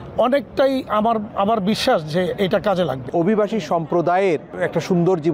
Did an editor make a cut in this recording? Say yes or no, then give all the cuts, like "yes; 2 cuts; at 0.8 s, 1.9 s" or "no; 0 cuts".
yes; 2 cuts; at 3.1 s, 4.5 s